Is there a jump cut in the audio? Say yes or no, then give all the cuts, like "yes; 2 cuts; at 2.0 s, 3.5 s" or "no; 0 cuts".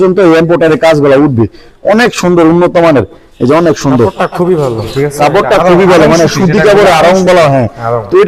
no; 0 cuts